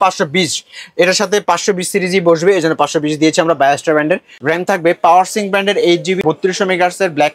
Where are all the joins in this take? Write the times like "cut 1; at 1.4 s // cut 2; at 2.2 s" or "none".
cut 1; at 4.3 s // cut 2; at 6.2 s